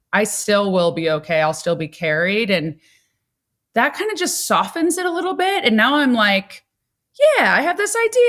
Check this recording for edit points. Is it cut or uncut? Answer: uncut